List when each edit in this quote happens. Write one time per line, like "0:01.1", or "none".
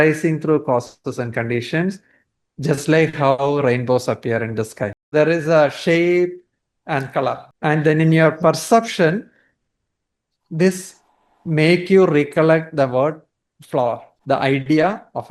0:05.1
0:07.5
0:14.1